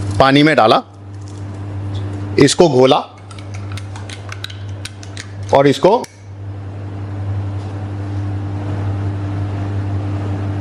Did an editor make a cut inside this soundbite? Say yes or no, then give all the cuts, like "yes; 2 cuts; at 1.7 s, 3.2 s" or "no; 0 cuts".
no; 0 cuts